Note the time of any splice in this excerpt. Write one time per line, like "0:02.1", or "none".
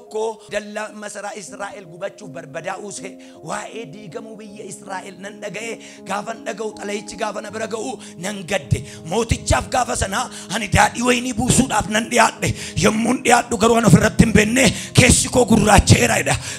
none